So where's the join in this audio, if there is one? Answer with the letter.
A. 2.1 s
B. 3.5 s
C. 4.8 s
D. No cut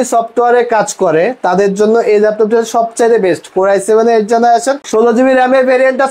C